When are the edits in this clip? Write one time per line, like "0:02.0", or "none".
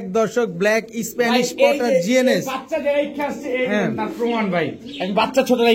none